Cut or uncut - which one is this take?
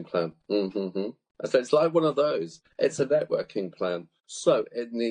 cut